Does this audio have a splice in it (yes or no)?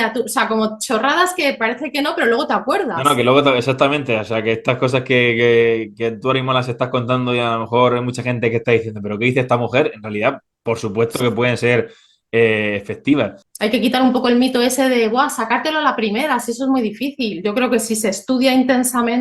yes